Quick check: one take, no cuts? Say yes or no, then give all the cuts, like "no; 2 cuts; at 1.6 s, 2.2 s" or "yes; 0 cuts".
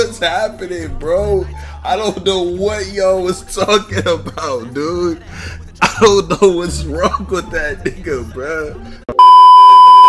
no; 1 cut; at 8.8 s